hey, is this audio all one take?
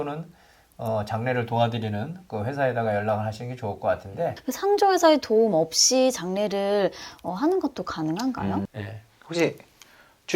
no; 2 cuts; at 4.4 s, 8.7 s

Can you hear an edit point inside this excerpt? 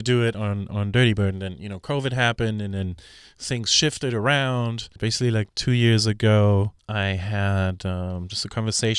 yes; 2 cuts; at 5.0 s, 6.8 s

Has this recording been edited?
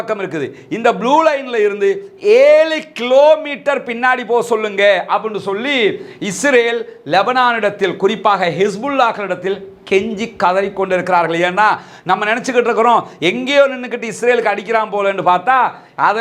no; 0 cuts

